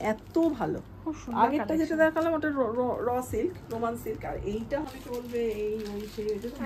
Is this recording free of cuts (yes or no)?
no